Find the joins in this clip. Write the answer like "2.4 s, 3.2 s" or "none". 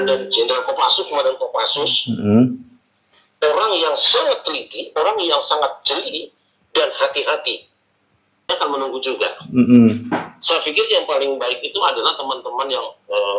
8.5 s

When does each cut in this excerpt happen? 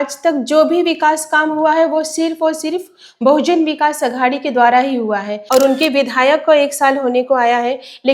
5.3 s

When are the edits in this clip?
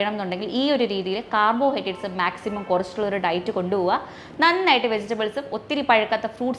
none

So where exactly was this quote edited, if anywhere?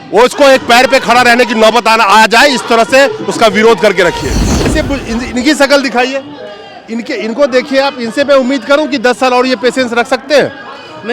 4.7 s

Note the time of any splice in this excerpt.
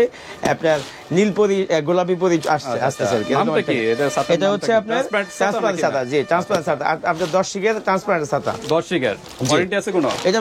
none

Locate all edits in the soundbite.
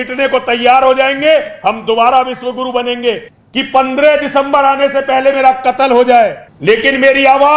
3.3 s, 6.5 s

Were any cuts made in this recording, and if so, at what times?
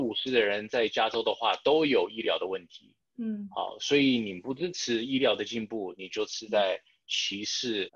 none

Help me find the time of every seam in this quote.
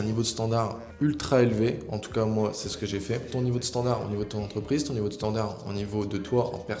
3.3 s

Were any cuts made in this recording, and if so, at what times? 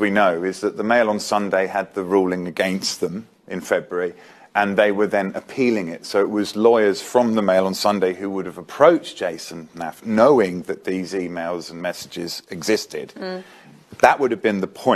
13.2 s

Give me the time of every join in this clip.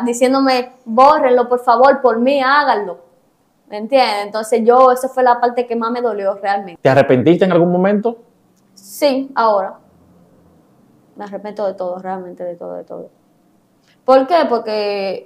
6.7 s

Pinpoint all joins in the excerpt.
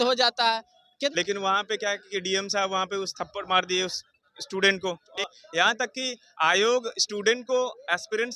1.1 s, 5.1 s

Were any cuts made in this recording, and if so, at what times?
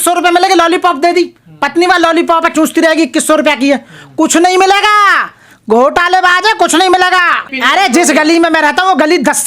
7.5 s

